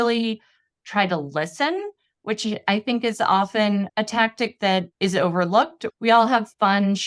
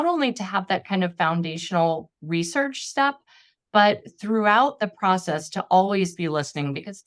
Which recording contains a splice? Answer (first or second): first